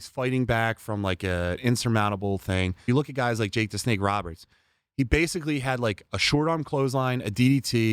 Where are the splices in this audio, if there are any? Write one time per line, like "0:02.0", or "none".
0:02.9